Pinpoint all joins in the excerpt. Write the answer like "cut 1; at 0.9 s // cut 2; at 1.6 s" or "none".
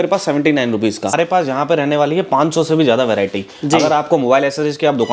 cut 1; at 1.2 s